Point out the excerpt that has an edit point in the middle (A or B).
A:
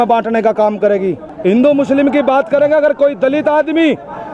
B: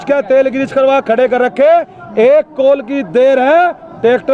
A